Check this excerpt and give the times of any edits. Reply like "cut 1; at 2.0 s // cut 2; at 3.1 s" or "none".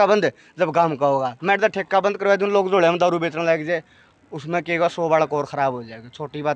none